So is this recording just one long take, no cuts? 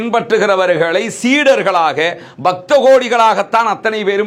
yes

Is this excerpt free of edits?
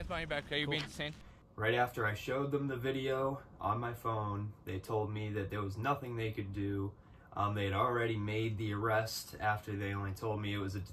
no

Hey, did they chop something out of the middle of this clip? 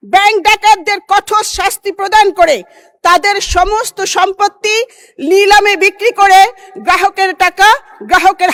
no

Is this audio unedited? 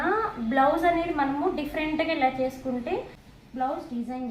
no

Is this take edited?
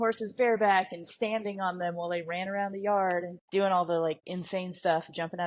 yes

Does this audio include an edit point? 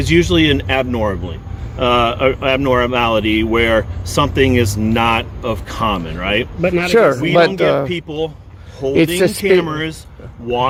no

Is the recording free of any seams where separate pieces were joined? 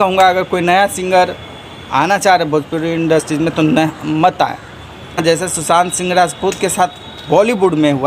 no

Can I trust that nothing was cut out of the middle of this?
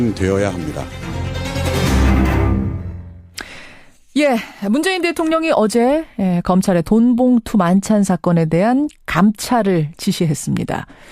no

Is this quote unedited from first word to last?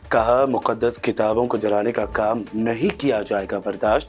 yes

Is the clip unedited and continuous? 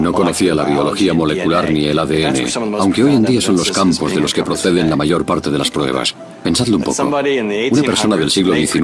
yes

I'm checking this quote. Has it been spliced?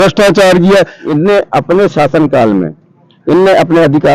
yes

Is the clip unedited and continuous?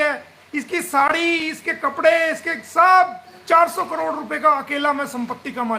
no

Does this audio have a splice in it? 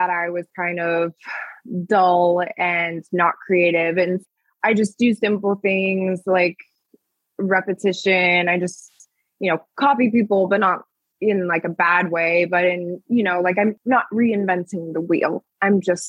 yes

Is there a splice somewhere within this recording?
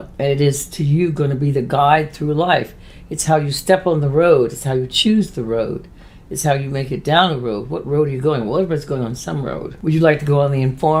no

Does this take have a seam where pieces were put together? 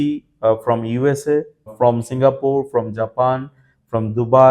no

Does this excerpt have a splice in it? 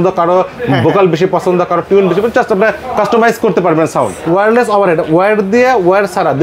yes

